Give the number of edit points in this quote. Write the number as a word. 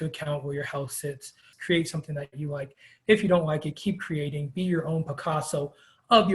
one